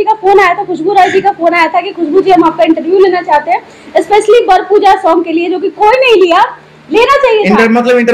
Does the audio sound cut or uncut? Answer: uncut